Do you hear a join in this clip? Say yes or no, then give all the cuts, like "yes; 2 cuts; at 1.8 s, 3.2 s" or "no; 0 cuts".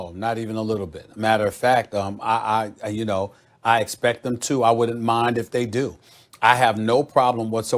no; 0 cuts